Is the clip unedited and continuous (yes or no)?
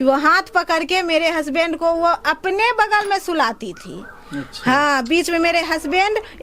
yes